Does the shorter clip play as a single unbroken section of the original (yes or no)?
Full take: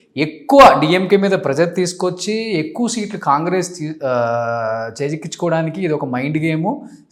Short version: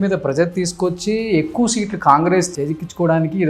no